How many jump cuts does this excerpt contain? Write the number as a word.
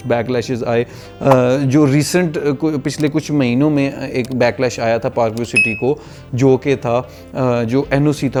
zero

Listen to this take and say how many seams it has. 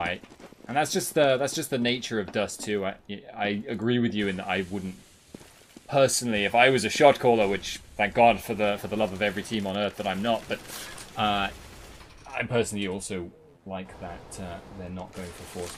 one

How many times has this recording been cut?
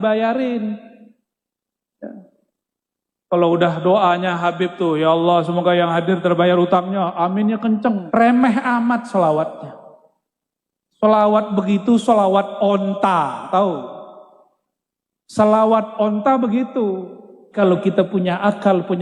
two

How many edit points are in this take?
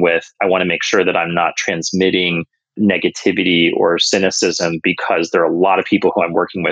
zero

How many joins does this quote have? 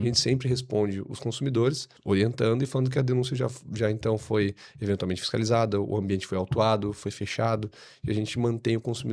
one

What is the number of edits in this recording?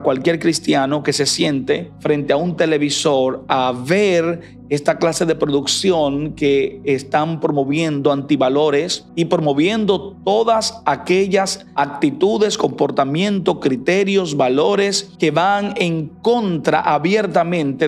four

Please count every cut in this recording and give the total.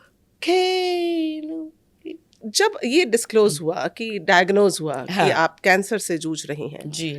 one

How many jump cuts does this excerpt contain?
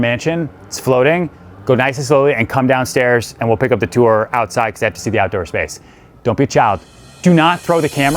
one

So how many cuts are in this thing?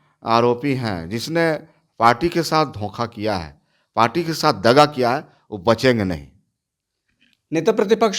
zero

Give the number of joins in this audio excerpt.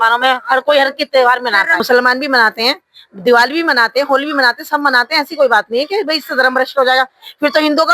one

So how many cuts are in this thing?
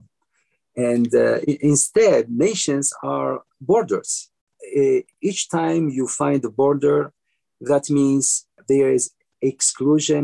two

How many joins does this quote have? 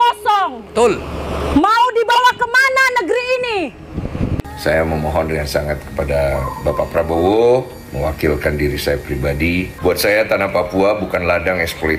two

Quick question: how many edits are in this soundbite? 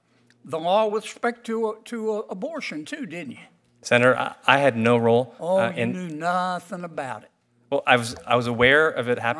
zero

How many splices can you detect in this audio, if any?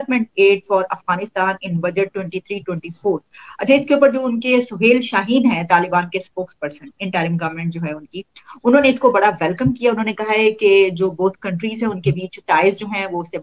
zero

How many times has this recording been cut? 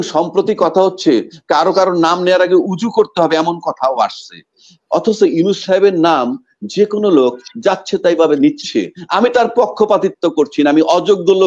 zero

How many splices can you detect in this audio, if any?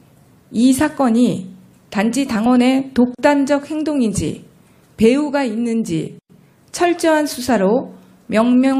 zero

